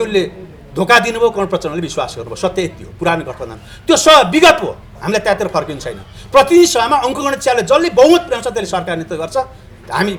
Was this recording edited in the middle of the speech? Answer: no; 0 cuts

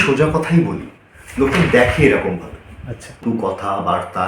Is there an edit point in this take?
yes; 1 cut; at 3.2 s

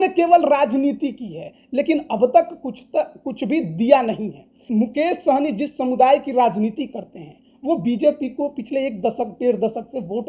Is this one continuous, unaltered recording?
no; 1 cut; at 4.6 s

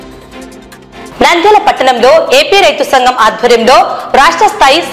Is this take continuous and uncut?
no; 1 cut; at 1.1 s

